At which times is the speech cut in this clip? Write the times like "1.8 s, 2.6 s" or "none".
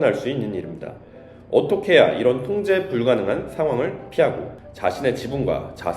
1.3 s